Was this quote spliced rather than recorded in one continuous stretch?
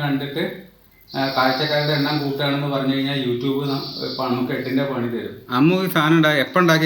yes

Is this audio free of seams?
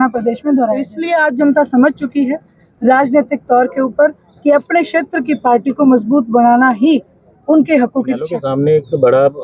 no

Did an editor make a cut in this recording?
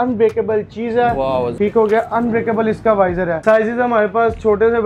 yes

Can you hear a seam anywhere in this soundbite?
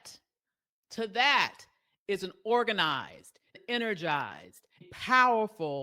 yes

